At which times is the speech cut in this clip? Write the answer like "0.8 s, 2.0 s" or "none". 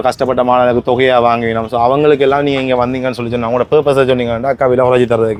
none